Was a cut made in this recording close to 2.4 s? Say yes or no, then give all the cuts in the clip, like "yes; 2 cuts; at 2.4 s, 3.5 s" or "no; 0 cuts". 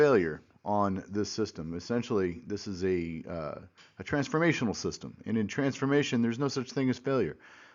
yes; 1 cut; at 2.4 s